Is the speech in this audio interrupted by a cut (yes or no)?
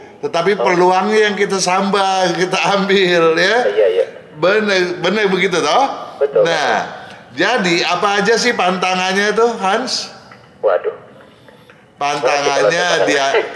no